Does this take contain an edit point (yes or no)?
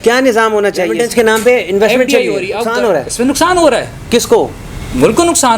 yes